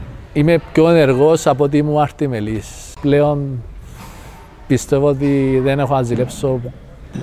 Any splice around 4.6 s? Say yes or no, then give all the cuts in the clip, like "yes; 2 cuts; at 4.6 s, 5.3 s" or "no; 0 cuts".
no; 1 cut; at 3.0 s